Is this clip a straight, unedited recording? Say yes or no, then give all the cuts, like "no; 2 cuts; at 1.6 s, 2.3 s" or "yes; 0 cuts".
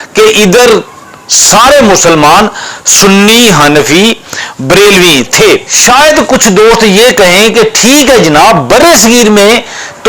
no; 1 cut; at 5.7 s